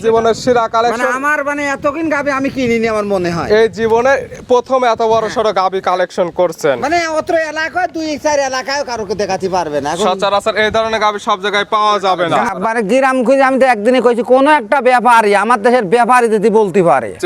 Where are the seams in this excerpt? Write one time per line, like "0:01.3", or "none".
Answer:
0:12.5